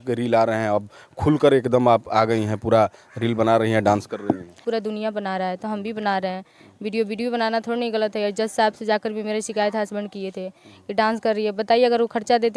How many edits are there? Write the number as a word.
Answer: one